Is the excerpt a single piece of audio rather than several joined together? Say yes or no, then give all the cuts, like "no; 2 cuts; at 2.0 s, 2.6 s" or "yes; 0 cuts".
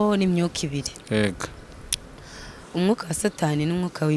yes; 0 cuts